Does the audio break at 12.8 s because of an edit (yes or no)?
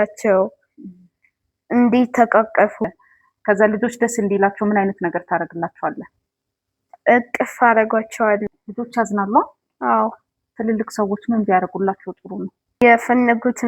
yes